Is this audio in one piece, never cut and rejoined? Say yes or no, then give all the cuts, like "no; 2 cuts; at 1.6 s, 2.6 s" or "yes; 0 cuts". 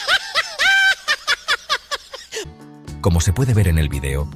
no; 1 cut; at 2.4 s